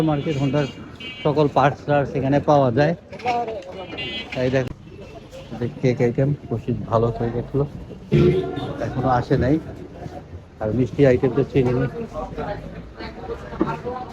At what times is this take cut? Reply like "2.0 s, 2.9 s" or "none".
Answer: 4.7 s

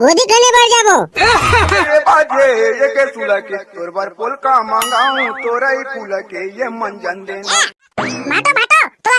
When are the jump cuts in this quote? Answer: 1.8 s, 7.8 s

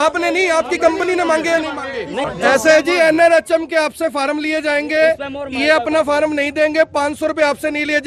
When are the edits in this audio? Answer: 2.2 s

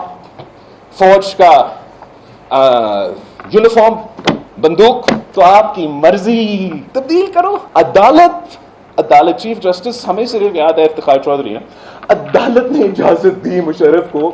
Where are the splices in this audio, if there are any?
4.5 s, 5.2 s, 6.8 s, 7.6 s

